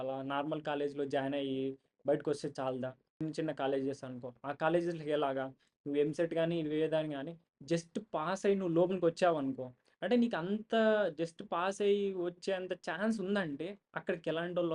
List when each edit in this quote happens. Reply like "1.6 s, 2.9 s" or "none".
3.2 s